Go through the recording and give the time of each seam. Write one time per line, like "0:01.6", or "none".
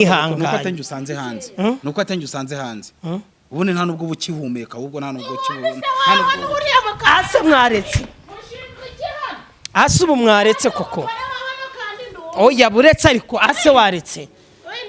none